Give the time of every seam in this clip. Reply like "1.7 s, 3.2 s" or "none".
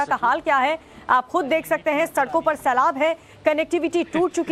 none